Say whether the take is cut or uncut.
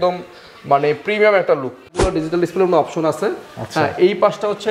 cut